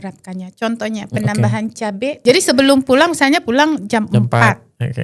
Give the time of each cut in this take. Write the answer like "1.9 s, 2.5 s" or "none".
2.2 s